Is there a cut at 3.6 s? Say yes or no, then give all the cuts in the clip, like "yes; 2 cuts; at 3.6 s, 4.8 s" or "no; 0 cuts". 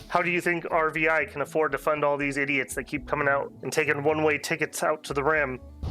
yes; 1 cut; at 3.6 s